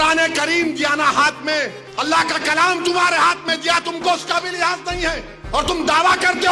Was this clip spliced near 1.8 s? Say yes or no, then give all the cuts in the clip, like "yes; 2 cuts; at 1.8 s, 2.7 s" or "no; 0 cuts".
yes; 2 cuts; at 1.8 s, 5.3 s